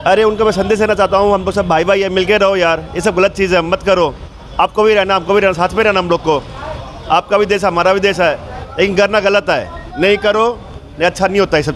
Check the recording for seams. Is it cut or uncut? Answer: uncut